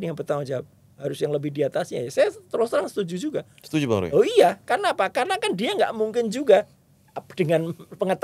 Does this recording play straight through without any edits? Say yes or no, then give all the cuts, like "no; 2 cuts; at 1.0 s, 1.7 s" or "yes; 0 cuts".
yes; 0 cuts